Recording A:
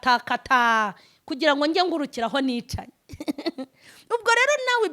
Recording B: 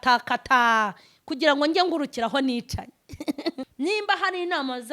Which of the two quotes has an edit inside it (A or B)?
B